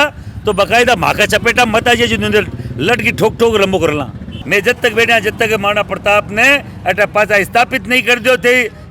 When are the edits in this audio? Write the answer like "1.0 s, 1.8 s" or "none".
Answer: 4.3 s